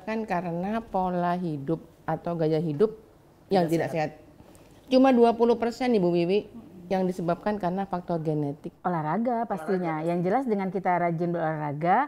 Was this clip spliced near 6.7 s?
no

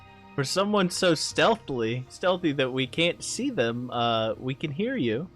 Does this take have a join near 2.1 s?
yes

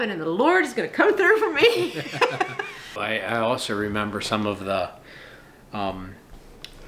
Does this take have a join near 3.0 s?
yes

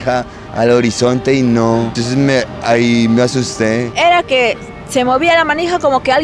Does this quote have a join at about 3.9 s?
yes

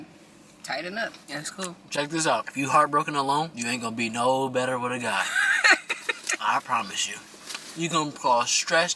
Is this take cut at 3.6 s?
yes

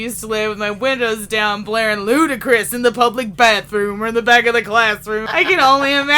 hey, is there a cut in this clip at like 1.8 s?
no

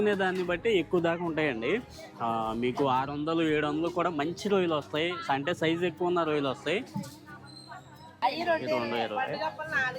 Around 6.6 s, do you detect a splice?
no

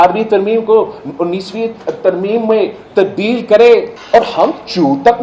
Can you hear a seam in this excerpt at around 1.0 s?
no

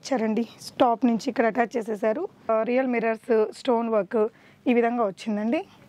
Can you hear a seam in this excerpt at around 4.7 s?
no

